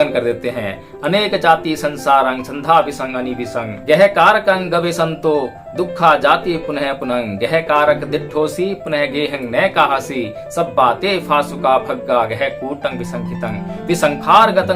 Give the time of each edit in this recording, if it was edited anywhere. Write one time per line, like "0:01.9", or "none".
0:03.7